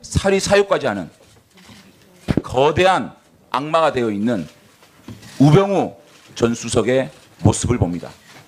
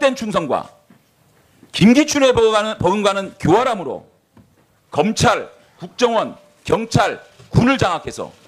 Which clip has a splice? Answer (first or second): second